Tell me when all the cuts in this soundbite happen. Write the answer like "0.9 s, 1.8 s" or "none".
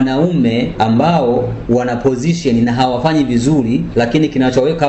none